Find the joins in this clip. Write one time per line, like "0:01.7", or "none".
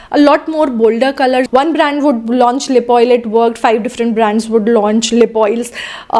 0:01.5